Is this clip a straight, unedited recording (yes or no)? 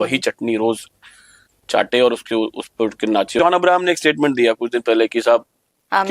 no